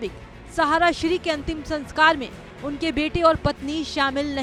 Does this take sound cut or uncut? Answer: uncut